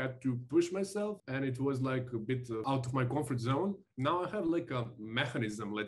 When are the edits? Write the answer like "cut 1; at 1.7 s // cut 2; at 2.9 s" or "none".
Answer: cut 1; at 1.2 s // cut 2; at 2.6 s // cut 3; at 3.9 s